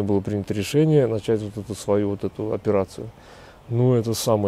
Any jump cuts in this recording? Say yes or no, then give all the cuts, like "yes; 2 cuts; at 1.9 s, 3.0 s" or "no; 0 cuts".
no; 0 cuts